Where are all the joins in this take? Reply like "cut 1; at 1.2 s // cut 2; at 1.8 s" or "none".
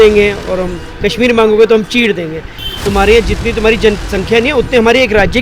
cut 1; at 2.6 s